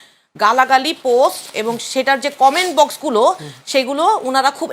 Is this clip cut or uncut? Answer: uncut